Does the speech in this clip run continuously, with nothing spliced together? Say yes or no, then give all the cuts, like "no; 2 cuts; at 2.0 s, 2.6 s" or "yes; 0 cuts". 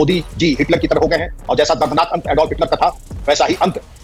yes; 0 cuts